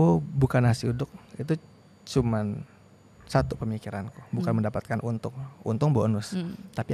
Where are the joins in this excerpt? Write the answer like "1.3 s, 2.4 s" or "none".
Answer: none